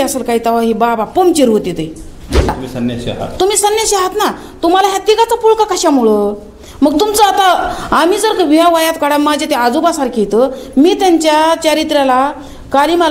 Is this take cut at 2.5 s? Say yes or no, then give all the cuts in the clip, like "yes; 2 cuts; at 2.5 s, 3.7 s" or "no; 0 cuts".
yes; 1 cut; at 2.5 s